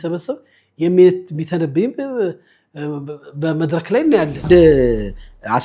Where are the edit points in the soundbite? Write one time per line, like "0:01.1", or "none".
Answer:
0:04.5